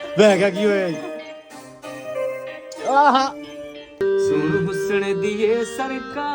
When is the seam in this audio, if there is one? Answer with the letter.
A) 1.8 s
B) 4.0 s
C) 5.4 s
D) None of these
B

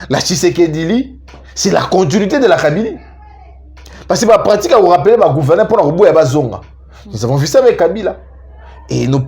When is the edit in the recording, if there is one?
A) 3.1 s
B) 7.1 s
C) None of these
C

